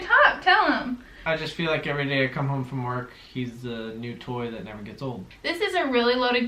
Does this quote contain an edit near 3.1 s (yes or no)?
no